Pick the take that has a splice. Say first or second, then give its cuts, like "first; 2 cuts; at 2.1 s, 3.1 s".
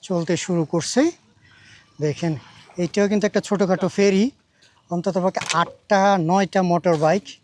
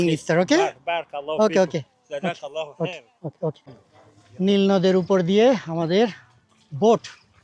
second; 1 cut; at 3.7 s